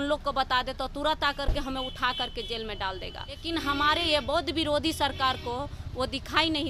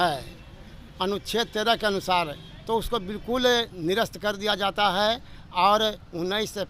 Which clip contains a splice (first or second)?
first